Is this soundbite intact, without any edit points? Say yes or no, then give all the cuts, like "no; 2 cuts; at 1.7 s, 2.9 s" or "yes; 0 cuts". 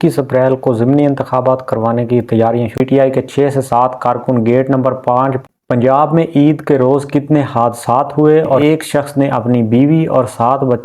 no; 3 cuts; at 2.8 s, 5.5 s, 8.6 s